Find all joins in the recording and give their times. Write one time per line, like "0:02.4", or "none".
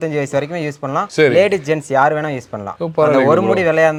none